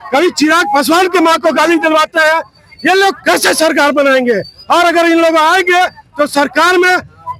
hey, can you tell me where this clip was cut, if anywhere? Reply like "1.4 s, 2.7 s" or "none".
none